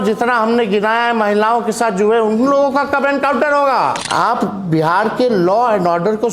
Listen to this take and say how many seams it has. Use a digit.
1